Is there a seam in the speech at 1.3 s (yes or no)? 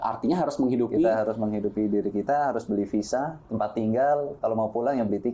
no